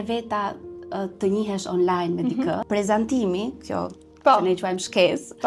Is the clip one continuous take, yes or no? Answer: no